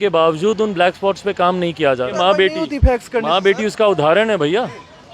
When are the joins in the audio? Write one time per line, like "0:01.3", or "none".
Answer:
0:02.1

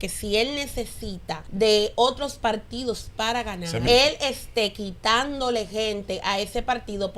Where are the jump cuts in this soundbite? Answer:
0:01.4
0:03.8

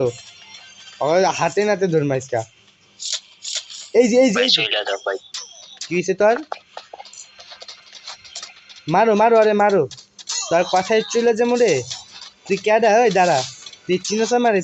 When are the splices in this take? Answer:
none

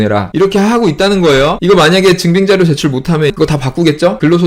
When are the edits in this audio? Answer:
0:03.3

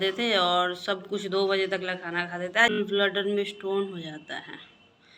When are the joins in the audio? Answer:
0:02.7

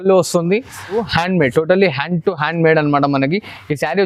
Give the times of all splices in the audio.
0:01.1

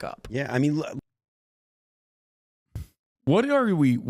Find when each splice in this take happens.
0:03.1

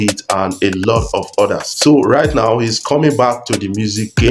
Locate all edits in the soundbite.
none

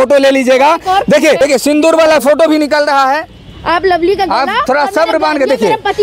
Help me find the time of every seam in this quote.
0:01.4

